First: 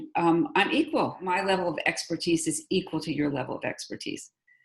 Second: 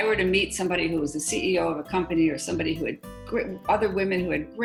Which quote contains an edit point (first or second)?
first